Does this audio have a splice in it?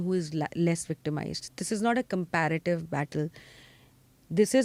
no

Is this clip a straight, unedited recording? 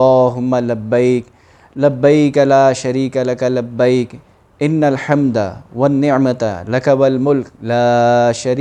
yes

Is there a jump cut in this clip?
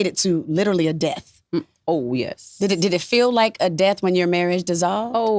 no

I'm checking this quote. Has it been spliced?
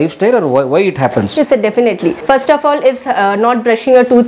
no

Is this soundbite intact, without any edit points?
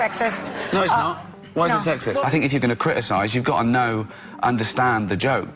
no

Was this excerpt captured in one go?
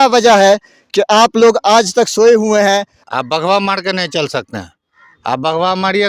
no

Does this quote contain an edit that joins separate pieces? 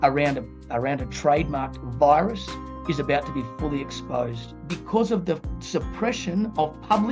yes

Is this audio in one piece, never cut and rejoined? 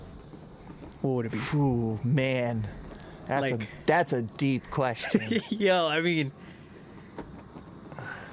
yes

